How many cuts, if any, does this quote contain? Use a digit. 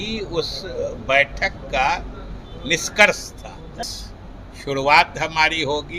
1